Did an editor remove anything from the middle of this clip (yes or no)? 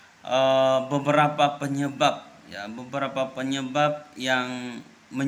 no